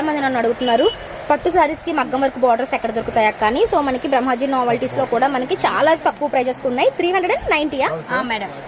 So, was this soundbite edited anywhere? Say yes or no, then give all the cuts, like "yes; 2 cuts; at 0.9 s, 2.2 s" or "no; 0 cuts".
no; 0 cuts